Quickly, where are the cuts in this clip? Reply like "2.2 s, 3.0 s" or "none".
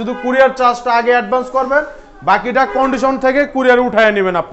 none